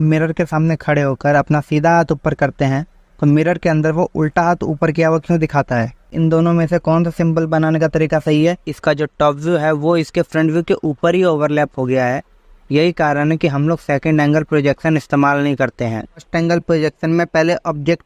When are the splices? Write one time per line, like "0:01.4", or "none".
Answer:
0:06.1
0:08.7
0:16.3